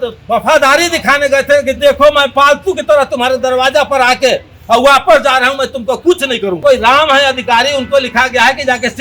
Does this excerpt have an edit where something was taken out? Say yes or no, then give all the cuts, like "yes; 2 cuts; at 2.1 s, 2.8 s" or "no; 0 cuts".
yes; 1 cut; at 6.6 s